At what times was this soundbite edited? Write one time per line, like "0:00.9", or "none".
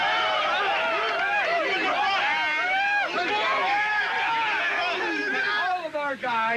none